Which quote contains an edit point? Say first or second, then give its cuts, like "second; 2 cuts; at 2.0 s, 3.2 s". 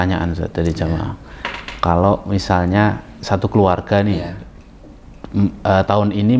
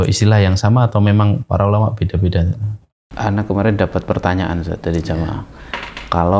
second; 1 cut; at 2.7 s